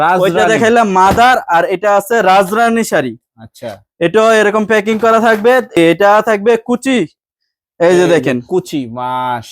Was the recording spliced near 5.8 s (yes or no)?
yes